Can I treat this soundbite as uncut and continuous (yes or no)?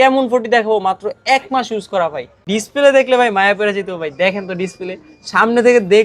no